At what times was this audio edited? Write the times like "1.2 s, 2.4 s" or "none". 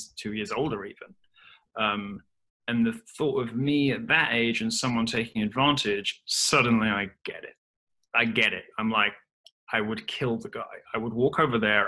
none